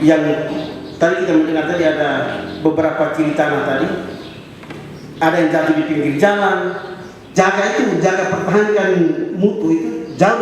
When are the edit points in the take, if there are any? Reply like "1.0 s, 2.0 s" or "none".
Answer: 7.2 s